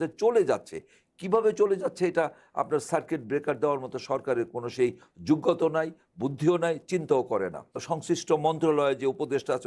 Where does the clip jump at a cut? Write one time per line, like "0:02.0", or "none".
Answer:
0:07.7

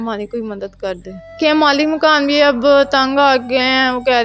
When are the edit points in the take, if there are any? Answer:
0:01.3

